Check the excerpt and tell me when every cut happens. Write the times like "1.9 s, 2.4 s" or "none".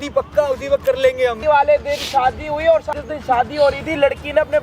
1.4 s, 3.0 s